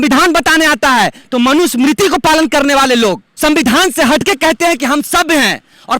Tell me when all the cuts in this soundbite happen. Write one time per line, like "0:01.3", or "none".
0:03.3